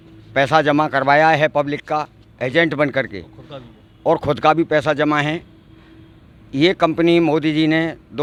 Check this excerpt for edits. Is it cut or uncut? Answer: uncut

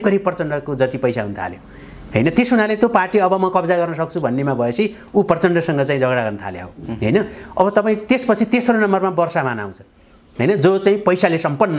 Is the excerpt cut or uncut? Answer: uncut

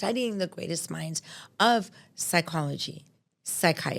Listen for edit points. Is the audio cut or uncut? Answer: uncut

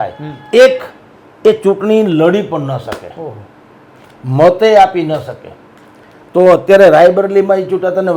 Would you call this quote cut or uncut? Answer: uncut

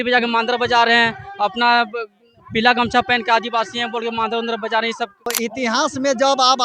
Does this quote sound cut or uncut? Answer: cut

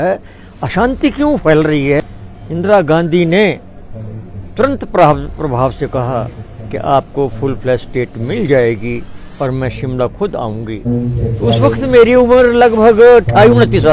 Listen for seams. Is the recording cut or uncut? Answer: cut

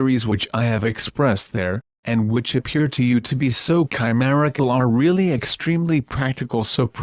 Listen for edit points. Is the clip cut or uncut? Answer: cut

